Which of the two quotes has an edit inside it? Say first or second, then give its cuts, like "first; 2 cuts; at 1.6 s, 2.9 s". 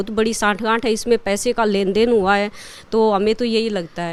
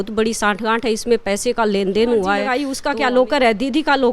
second; 1 cut; at 2.7 s